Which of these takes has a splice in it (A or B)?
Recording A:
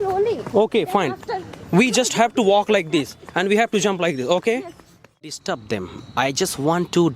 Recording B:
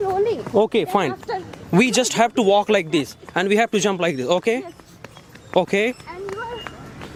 A